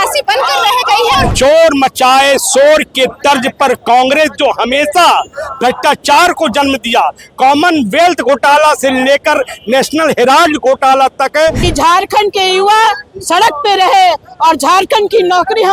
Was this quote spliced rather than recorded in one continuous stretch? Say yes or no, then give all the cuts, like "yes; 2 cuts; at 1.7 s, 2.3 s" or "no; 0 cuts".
yes; 2 cuts; at 1.3 s, 11.6 s